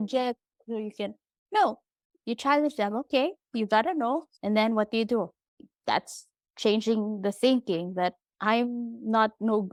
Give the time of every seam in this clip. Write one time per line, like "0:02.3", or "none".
none

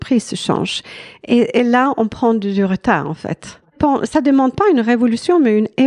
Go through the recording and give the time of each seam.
0:03.7

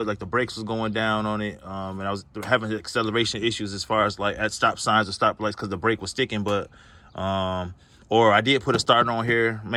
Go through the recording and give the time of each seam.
none

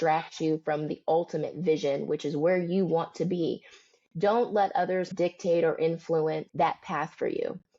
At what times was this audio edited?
0:05.1
0:06.5

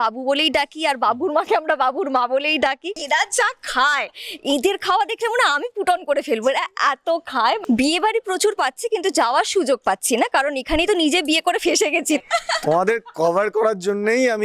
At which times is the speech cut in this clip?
0:02.9
0:07.6
0:12.2

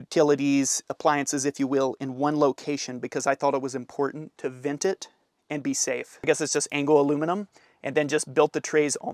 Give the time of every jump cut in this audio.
0:06.2

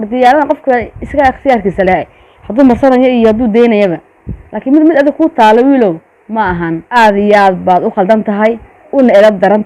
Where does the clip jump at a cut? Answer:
0:06.8

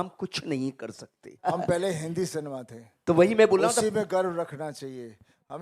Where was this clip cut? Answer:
0:01.5

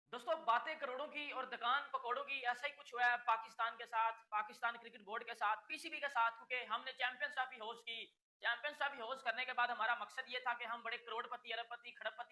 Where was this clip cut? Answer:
none

